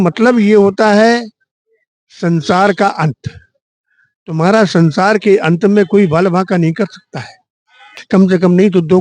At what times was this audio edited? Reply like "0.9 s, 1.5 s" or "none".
7.9 s

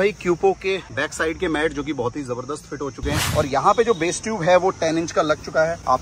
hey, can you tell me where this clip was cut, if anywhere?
3.2 s

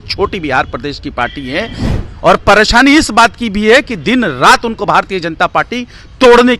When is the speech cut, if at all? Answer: 1.8 s

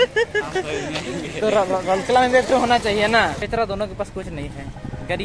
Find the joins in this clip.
3.4 s

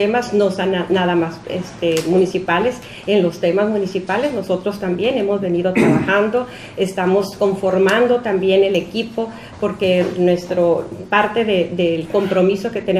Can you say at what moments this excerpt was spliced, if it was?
8.2 s

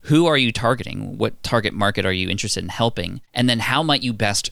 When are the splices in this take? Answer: 3.2 s

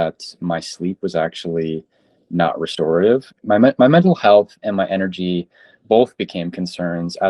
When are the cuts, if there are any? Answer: 3.3 s

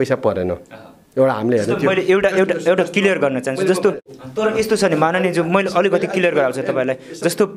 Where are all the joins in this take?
4.1 s

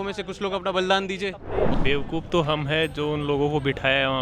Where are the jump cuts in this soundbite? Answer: 1.7 s

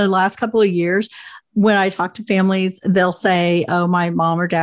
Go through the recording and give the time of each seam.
none

